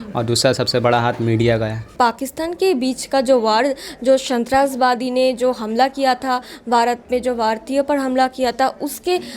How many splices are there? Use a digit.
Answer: 1